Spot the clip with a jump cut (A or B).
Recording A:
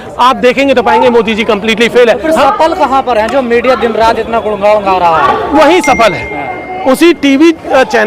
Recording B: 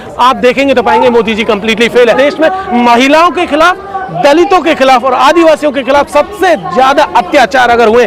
B